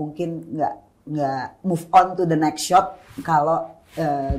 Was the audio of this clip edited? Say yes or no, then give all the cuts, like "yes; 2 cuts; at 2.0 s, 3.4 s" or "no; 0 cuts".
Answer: no; 0 cuts